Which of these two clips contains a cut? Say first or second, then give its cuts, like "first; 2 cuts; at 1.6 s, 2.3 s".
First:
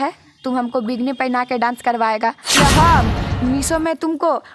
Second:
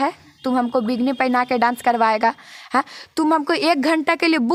first; 1 cut; at 2.6 s